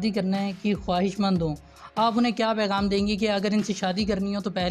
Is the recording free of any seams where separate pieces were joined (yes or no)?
yes